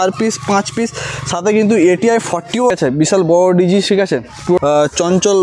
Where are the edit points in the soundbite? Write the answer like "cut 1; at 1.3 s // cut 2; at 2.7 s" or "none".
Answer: cut 1; at 2.7 s // cut 2; at 4.6 s